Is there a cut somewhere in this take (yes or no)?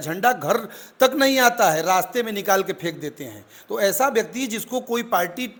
no